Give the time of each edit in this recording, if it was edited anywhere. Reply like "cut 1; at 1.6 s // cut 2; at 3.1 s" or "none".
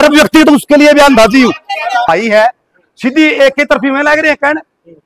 cut 1; at 2.1 s